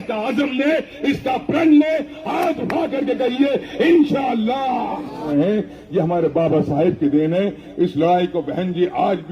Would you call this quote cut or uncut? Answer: cut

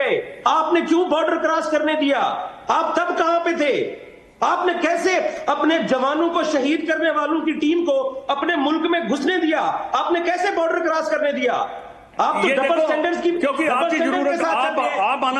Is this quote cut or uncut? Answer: uncut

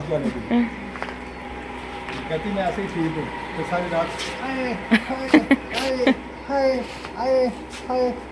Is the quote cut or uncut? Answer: uncut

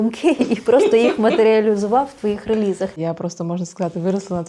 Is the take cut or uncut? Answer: cut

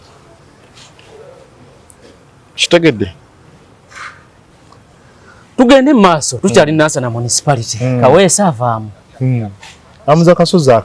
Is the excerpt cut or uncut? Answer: uncut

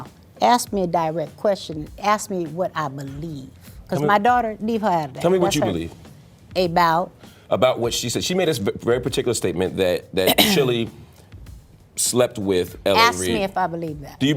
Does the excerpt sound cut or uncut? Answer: uncut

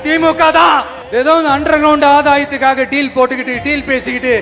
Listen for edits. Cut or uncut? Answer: cut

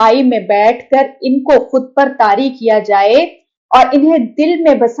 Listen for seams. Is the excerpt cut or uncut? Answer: uncut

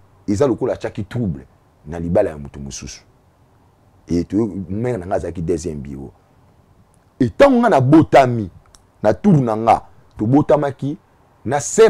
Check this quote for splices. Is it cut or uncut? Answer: uncut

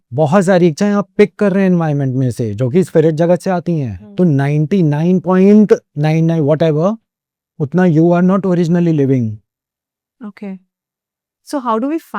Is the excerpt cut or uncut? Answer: uncut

